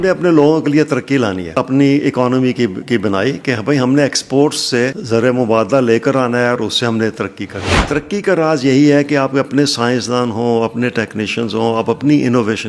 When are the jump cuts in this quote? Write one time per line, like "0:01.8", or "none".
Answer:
0:01.5
0:05.0
0:07.7